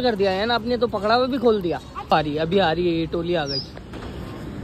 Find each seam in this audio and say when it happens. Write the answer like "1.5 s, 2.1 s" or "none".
2.1 s